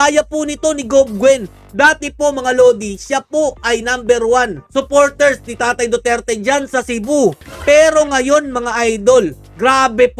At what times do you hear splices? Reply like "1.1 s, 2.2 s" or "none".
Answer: none